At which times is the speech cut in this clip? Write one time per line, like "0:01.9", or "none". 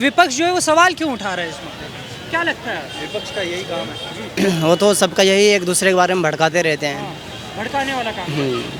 none

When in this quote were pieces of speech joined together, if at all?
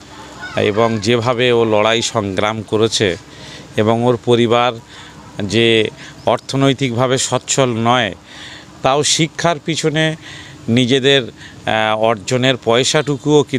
none

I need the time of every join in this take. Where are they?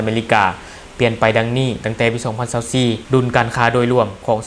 0:03.0

